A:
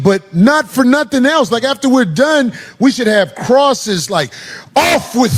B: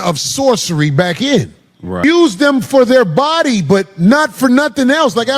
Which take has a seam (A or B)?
B